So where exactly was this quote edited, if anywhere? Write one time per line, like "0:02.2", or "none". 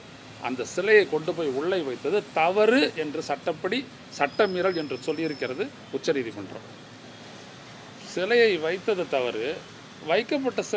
none